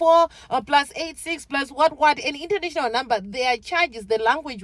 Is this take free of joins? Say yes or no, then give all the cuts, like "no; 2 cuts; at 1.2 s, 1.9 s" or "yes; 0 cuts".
yes; 0 cuts